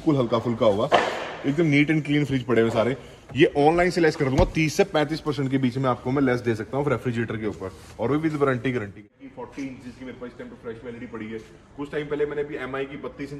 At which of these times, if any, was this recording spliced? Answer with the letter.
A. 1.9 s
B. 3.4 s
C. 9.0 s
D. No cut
C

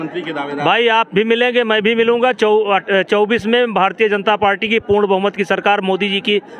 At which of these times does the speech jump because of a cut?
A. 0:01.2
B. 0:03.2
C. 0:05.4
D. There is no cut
D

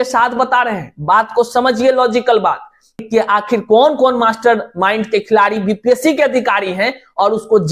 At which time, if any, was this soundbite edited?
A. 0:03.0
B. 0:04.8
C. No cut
A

